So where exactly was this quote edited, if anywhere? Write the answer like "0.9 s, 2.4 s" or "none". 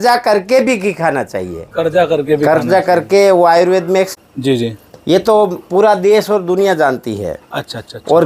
4.1 s